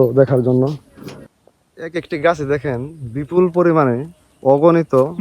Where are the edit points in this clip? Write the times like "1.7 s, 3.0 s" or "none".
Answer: 1.5 s